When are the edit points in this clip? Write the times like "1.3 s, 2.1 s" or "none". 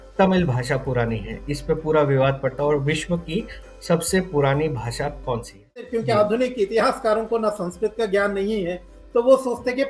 5.9 s